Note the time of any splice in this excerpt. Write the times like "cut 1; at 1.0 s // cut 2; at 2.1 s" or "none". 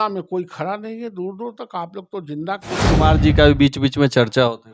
cut 1; at 2.8 s